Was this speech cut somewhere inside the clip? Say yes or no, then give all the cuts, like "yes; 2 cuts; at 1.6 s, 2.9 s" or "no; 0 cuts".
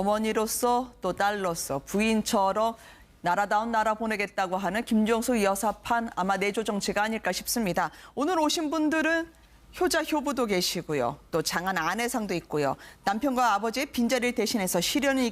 yes; 1 cut; at 3.6 s